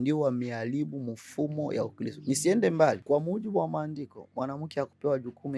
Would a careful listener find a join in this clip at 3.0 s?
yes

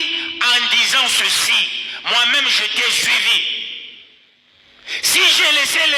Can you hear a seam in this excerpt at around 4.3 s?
no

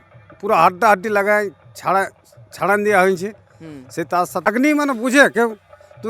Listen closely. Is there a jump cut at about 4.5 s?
yes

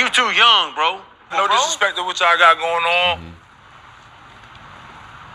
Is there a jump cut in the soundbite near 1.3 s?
yes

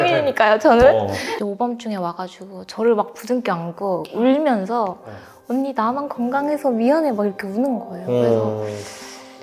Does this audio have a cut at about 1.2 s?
yes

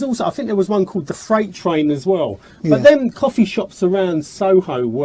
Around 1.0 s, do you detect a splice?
no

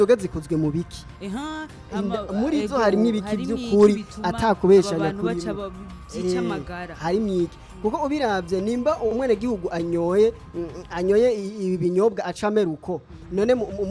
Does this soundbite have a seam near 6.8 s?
yes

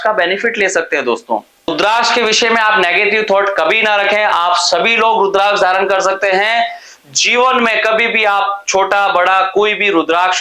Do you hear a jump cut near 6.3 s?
no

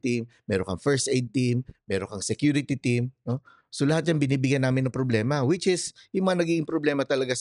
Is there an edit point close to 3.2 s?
no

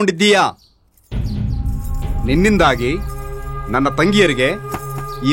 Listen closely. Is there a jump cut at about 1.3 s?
no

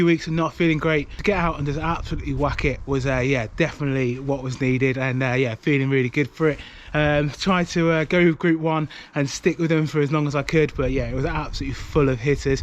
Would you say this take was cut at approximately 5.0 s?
no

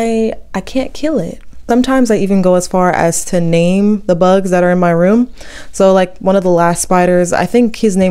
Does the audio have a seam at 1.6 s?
yes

